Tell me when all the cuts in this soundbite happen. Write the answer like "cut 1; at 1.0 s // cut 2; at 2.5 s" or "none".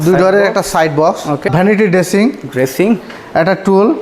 cut 1; at 1.4 s